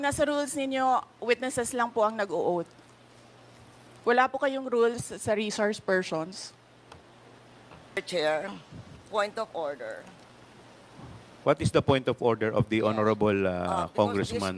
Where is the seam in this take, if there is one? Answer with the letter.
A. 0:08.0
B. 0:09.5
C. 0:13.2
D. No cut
A